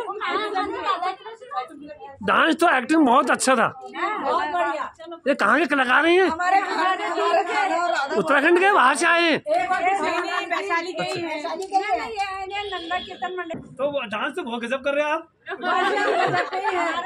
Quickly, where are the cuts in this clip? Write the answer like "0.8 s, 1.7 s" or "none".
13.6 s

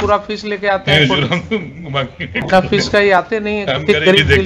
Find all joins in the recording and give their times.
none

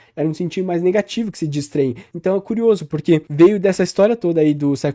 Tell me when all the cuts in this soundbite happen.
2.0 s, 3.3 s

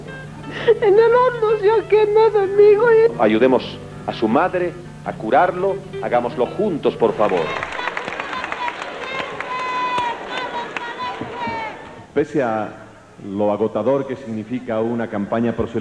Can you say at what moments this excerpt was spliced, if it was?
7.6 s

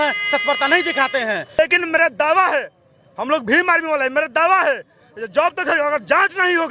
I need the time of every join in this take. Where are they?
1.6 s

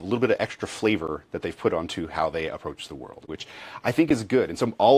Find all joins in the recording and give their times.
3.2 s

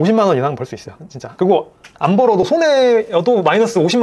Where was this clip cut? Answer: none

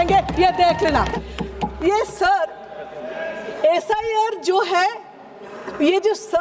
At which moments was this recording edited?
1.1 s

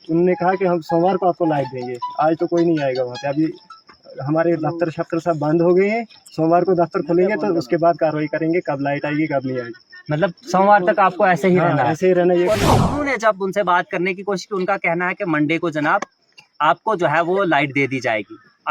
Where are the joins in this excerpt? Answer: 12.6 s

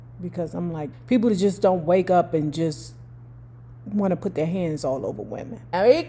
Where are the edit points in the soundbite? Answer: 0.9 s

